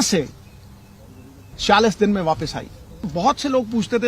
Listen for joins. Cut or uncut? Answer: cut